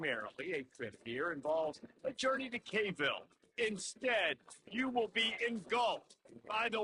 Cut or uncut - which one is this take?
uncut